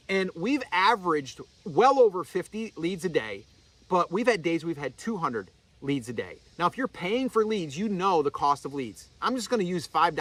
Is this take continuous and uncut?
yes; 0 cuts

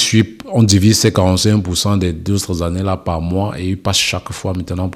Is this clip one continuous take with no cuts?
yes; 0 cuts

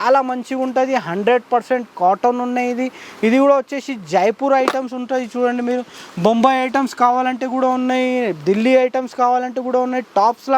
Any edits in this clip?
no; 0 cuts

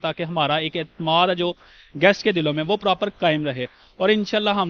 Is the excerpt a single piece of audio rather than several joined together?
yes; 0 cuts

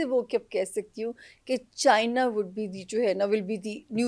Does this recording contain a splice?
no; 0 cuts

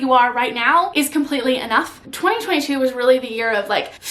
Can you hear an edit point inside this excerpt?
yes; 2 cuts; at 0.9 s, 2.0 s

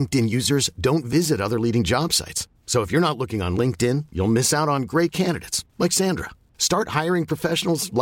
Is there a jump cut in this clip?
no; 0 cuts

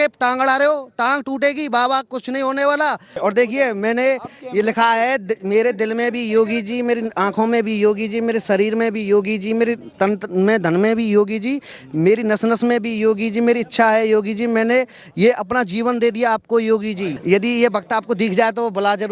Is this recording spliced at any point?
yes; 2 cuts; at 3.1 s, 17.1 s

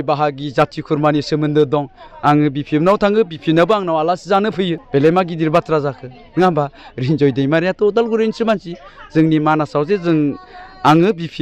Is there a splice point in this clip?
yes; 1 cut; at 4.8 s

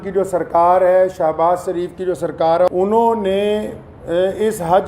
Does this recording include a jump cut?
yes; 1 cut; at 2.7 s

